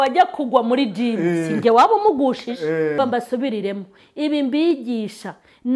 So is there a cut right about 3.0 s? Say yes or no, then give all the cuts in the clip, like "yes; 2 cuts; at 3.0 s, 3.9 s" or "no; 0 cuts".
yes; 1 cut; at 3.0 s